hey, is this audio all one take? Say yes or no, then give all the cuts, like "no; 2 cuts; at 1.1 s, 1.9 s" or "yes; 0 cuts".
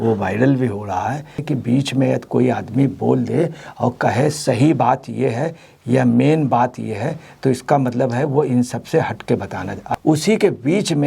no; 2 cuts; at 1.4 s, 9.9 s